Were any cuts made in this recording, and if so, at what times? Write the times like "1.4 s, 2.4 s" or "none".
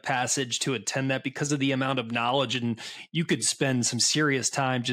none